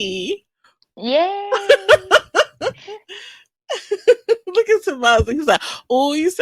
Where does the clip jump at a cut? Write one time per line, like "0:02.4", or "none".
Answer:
none

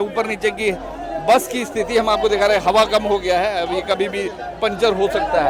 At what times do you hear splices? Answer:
none

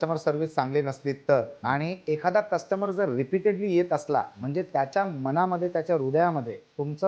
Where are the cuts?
none

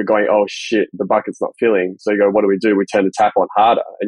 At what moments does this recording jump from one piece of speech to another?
0:00.9

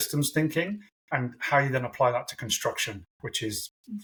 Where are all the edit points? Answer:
none

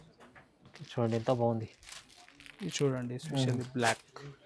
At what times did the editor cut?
none

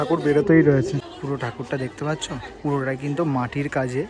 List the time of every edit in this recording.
0:01.1

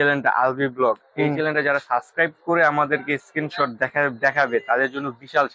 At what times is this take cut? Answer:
none

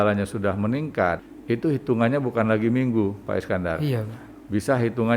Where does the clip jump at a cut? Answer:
0:01.3

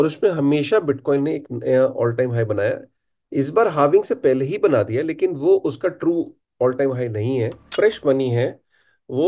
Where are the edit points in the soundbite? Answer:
0:07.6

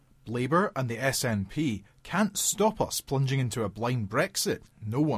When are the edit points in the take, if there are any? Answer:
none

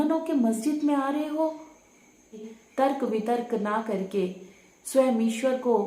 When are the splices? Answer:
0:02.4

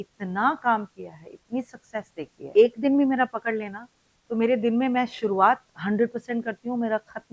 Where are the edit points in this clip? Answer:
0:02.5

